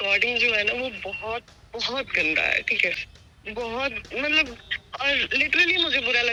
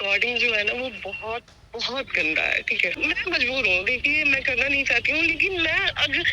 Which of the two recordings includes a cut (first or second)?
second